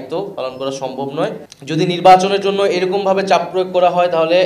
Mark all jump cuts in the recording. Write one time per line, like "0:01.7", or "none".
0:01.5